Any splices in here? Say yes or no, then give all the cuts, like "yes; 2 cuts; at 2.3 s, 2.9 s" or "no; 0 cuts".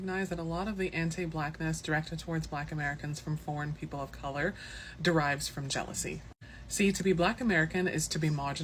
no; 0 cuts